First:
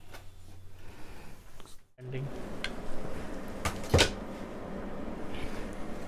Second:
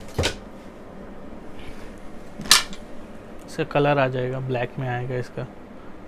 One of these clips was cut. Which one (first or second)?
first